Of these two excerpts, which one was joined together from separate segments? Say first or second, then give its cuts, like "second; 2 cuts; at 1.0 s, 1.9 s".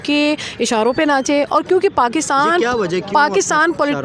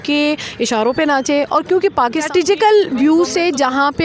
second; 1 cut; at 2.3 s